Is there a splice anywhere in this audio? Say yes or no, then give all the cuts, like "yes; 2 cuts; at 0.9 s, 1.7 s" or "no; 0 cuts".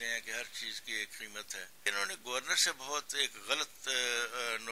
yes; 1 cut; at 1.9 s